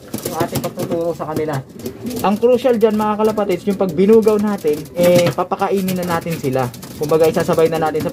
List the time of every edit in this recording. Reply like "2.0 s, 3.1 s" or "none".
2.1 s, 4.9 s